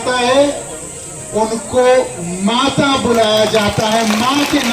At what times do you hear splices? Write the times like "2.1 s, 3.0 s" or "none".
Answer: none